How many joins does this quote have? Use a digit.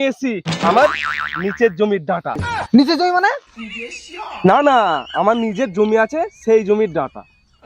0